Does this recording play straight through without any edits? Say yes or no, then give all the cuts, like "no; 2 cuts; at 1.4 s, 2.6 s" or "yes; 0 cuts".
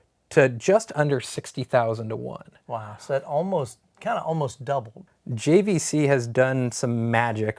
no; 1 cut; at 5.1 s